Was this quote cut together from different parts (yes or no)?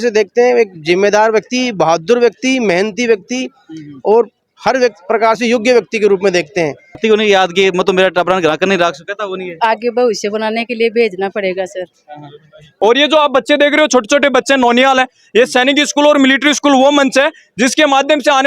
yes